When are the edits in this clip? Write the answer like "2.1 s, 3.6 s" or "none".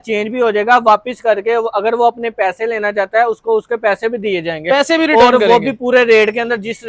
none